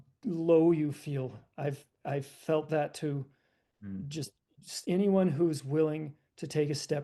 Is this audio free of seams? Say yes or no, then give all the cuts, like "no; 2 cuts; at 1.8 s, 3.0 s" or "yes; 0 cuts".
yes; 0 cuts